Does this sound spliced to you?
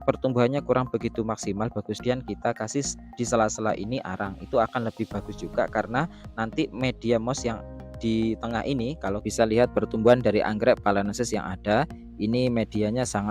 yes; 2 cuts; at 2.0 s, 9.3 s

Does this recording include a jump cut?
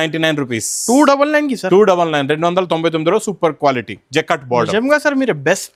no; 0 cuts

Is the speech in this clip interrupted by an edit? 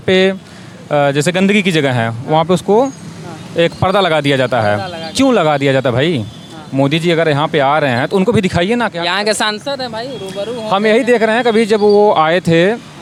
no; 0 cuts

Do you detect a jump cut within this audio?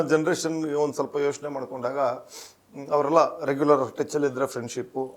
no; 0 cuts

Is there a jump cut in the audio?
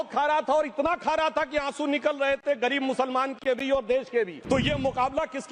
yes; 1 cut; at 4.4 s

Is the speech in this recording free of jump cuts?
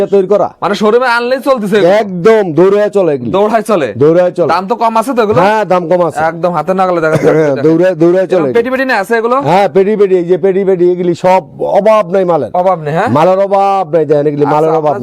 yes; 0 cuts

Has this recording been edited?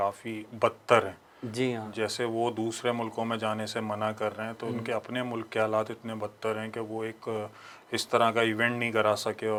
no; 0 cuts

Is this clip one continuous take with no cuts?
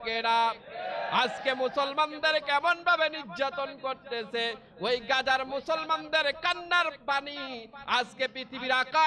yes; 0 cuts

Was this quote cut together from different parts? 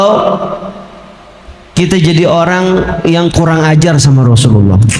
no; 0 cuts

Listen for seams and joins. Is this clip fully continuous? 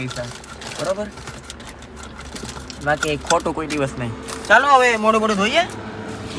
yes; 0 cuts

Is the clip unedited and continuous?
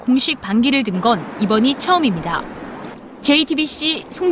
yes; 0 cuts

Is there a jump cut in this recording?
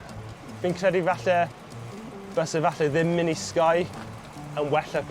no; 0 cuts

